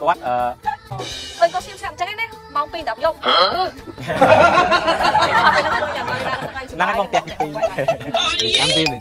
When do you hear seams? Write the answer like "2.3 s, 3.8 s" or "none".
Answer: 0.9 s